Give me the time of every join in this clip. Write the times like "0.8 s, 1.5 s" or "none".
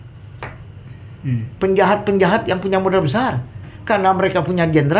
none

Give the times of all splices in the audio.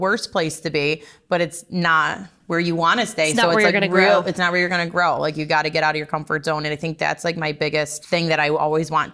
8.0 s

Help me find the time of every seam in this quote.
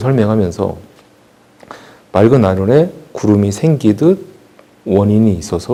none

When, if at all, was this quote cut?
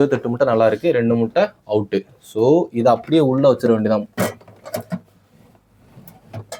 none

